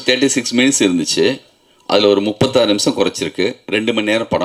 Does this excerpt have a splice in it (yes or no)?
no